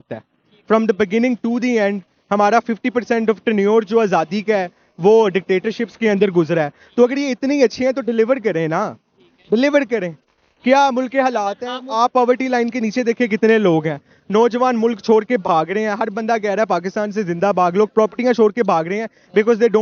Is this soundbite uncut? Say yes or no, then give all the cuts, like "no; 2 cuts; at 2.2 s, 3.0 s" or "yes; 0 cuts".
yes; 0 cuts